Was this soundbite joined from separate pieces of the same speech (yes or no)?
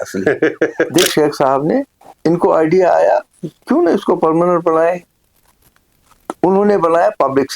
yes